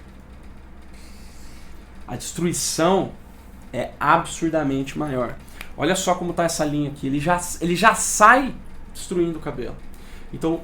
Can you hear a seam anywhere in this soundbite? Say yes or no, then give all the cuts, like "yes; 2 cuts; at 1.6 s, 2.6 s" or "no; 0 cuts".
no; 0 cuts